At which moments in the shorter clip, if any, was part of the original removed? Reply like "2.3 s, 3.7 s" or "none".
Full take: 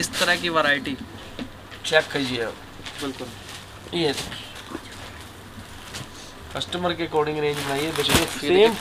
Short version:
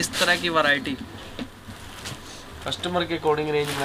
1.7 s